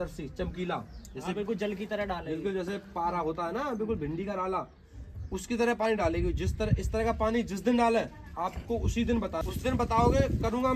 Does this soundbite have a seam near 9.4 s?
yes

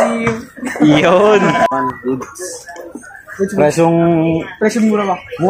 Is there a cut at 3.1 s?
no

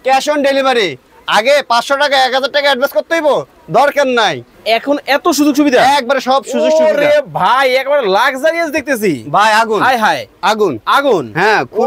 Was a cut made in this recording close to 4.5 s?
yes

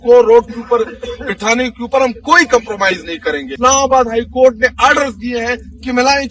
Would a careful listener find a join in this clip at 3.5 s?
yes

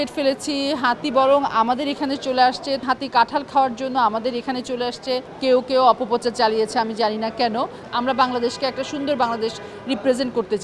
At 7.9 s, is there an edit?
yes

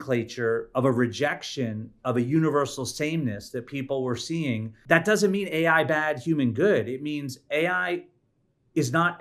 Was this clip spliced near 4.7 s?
yes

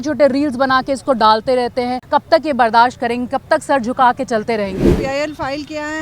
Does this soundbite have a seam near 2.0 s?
yes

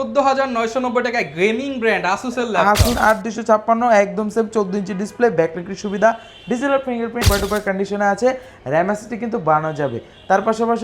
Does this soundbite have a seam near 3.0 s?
yes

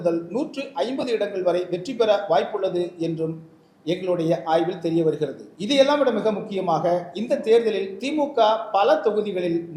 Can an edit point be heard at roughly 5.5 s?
yes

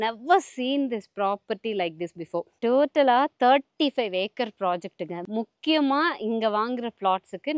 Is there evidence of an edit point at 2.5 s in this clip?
yes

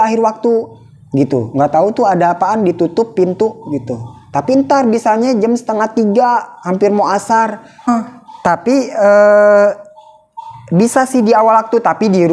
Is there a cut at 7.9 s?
yes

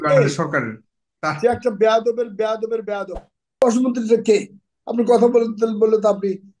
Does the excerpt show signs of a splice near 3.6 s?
yes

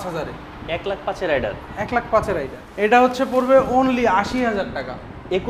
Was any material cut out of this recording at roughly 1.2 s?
no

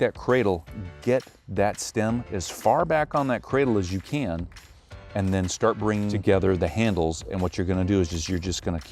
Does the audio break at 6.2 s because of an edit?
yes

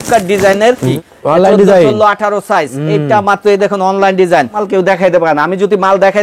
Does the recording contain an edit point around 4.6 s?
yes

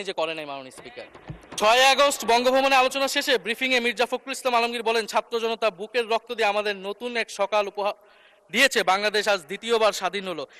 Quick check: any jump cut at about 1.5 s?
yes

